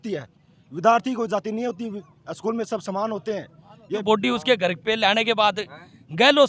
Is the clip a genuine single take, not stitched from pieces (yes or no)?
no